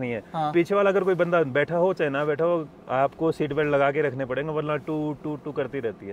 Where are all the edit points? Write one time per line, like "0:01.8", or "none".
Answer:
none